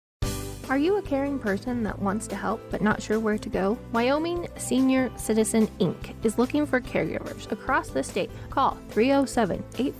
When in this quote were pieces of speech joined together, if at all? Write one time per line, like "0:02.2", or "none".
0:01.4